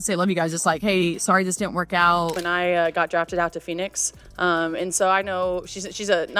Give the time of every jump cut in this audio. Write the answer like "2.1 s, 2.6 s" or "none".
2.4 s

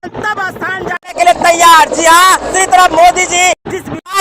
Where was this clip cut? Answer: 2.5 s

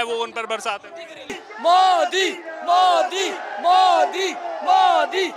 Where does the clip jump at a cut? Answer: 1.3 s

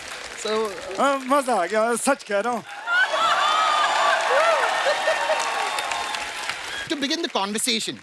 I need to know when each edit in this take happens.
6.8 s

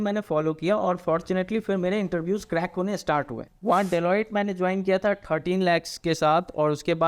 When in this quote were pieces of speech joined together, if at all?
3.4 s

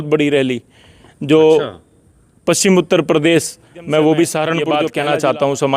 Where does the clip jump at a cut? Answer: 4.7 s

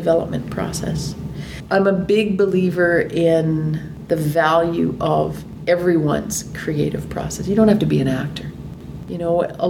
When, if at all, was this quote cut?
8.8 s

